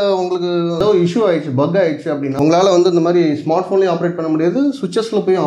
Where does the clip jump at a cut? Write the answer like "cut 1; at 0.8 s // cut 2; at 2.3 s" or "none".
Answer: cut 1; at 0.8 s // cut 2; at 2.3 s